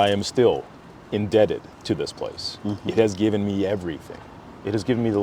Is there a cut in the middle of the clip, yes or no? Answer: no